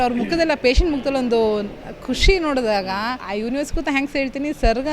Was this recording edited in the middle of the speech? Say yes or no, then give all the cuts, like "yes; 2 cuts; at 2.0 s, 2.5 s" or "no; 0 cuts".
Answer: yes; 1 cut; at 3.2 s